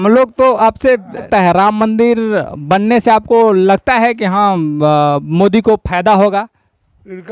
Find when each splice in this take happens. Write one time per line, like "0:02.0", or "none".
0:01.3